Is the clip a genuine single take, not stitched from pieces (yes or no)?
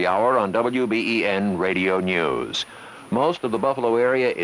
yes